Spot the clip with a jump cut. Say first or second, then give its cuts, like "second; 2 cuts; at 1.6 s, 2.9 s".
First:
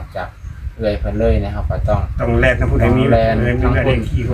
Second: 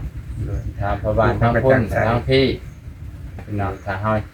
second; 1 cut; at 3.4 s